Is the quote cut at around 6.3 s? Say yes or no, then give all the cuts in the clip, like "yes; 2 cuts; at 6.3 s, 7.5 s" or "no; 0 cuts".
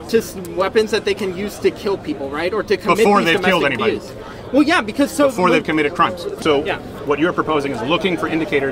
yes; 1 cut; at 6.3 s